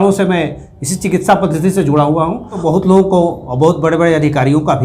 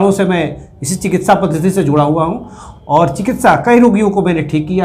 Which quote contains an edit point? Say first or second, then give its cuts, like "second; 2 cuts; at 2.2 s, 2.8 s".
first; 1 cut; at 2.6 s